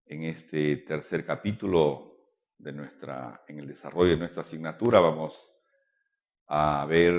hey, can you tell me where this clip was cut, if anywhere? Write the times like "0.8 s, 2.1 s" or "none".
3.0 s